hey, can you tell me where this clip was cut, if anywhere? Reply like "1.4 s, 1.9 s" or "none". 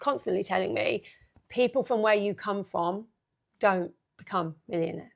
none